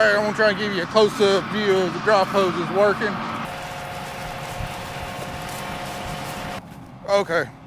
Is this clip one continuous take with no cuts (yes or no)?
no